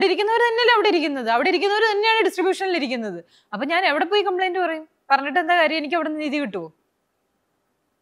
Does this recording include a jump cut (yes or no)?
no